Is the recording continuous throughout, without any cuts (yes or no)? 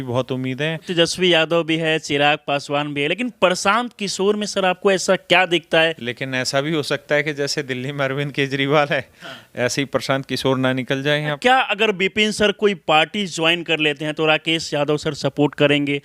no